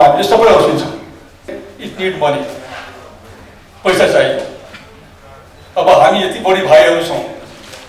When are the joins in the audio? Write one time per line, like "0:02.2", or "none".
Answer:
0:01.6